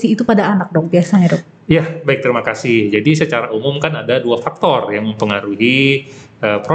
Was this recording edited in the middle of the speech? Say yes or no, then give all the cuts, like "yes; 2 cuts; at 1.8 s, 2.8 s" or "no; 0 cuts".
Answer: no; 0 cuts